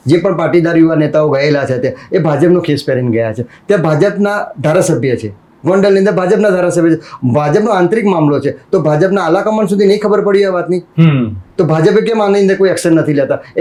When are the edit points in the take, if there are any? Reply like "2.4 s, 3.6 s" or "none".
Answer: none

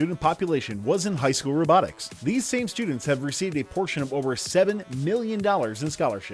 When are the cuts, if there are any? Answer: none

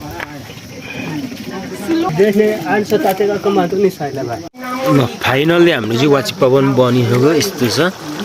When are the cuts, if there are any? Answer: 4.6 s

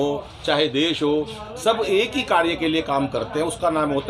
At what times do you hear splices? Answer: none

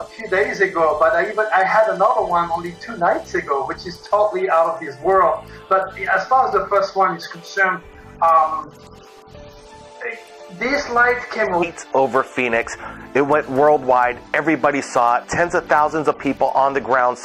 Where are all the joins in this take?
none

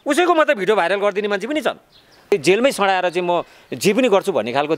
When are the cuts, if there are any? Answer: 2.3 s

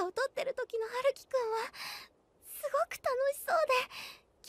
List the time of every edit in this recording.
2.7 s

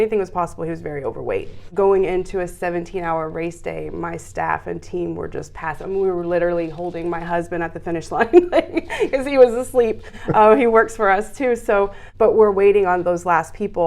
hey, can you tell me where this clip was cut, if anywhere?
1.6 s, 12.0 s

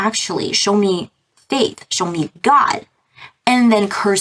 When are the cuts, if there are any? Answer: none

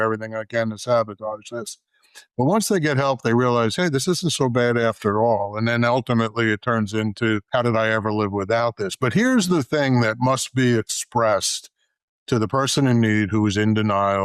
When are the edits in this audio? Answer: 7.4 s

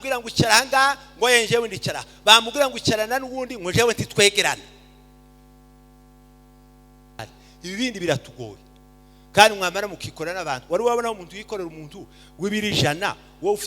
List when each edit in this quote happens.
7.2 s

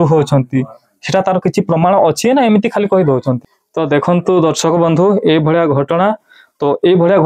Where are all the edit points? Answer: 3.5 s

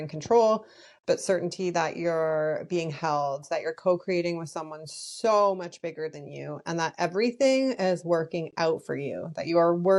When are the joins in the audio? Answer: none

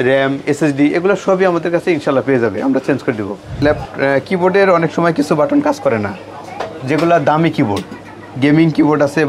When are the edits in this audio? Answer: 3.5 s

